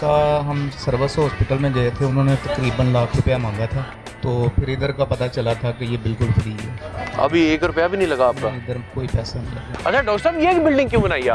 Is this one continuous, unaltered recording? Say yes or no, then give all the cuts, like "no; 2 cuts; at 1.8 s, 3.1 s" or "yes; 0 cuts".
no; 2 cuts; at 3.9 s, 9.6 s